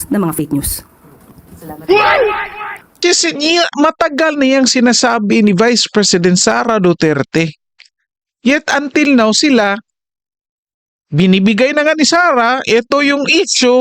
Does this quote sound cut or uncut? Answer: cut